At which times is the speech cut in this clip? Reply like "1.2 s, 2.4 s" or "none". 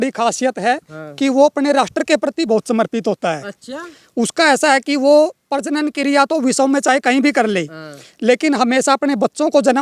none